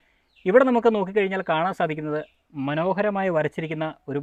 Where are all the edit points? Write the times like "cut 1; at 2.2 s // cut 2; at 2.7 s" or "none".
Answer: none